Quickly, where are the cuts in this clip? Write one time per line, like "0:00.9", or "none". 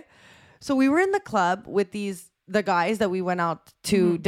none